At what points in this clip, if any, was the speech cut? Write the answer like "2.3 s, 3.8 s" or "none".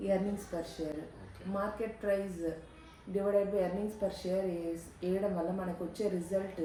none